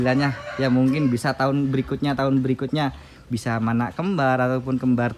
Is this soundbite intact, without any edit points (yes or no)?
yes